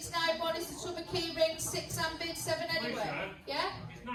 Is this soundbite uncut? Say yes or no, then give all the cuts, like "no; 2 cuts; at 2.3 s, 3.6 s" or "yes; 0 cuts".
yes; 0 cuts